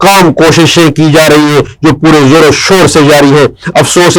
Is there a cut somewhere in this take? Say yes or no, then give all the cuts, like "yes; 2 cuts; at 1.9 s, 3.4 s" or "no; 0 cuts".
no; 0 cuts